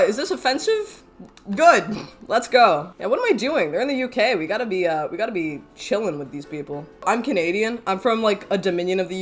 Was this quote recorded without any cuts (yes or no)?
no